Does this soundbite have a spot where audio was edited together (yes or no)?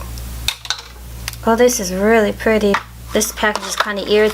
yes